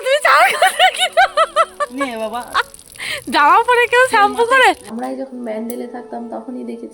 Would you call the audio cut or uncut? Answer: cut